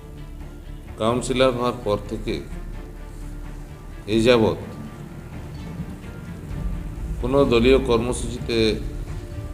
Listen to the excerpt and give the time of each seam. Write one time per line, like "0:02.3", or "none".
0:01.0